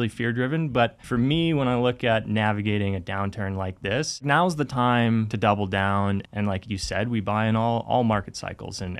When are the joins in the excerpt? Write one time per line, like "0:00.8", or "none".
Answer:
0:01.0
0:04.2
0:05.3
0:06.2